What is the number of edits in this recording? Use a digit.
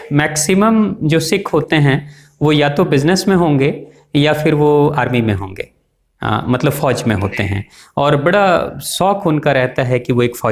0